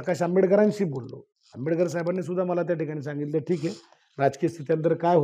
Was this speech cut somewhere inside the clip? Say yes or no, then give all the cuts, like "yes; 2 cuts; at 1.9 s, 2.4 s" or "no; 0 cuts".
no; 0 cuts